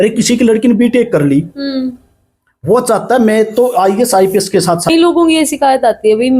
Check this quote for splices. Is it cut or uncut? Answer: cut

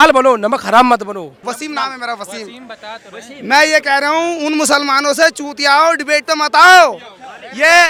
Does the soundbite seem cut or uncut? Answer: uncut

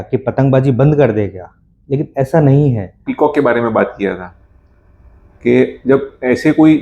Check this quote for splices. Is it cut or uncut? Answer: cut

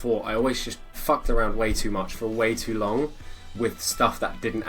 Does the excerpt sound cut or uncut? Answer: uncut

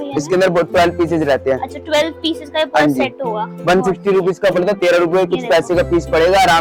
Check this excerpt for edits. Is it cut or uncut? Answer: uncut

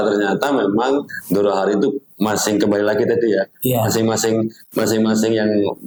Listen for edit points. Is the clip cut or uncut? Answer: uncut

